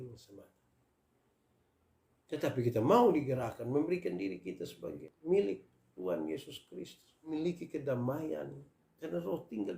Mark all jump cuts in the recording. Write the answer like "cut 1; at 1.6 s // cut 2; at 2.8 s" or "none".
cut 1; at 5.0 s // cut 2; at 7.3 s